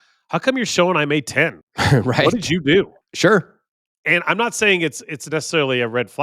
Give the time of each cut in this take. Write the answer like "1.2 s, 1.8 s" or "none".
1.7 s, 3.0 s